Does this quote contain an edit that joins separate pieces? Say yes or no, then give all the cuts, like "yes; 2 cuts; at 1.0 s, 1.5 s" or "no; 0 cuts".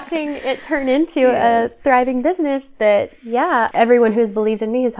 yes; 1 cut; at 3.7 s